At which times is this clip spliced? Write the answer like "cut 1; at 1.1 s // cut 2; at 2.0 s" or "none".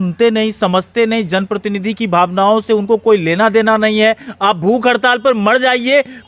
none